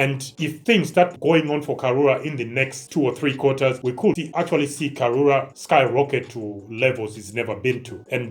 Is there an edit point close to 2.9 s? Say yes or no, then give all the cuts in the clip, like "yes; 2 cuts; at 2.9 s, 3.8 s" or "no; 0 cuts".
no; 1 cut; at 1.1 s